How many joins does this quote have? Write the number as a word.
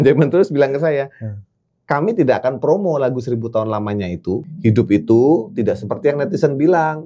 one